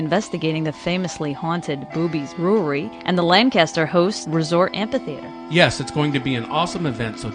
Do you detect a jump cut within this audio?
yes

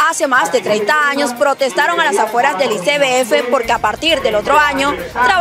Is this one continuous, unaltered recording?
yes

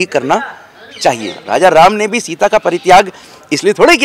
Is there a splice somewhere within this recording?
yes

